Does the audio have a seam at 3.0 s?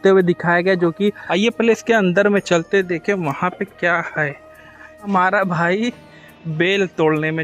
no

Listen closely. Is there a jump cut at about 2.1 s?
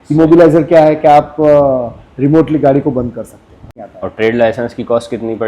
no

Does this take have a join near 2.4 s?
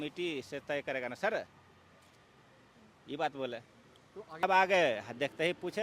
no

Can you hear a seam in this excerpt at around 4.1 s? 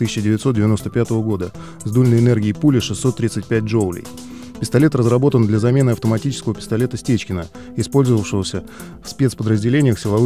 no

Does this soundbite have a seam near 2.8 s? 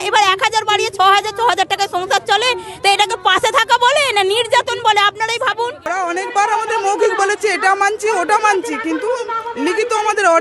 no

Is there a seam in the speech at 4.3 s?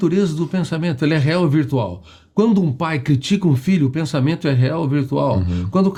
no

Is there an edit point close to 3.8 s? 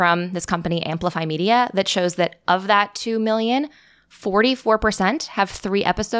no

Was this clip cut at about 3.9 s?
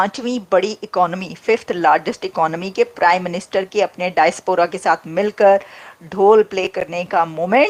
no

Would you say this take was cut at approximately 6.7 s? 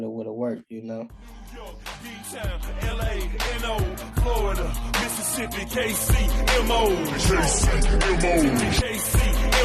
no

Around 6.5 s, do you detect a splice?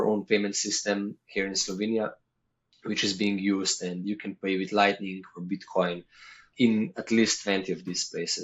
yes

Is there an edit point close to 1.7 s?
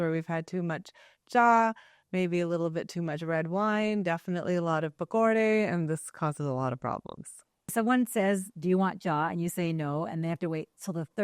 no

